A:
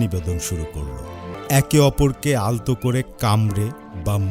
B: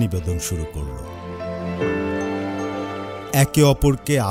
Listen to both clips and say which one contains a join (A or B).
A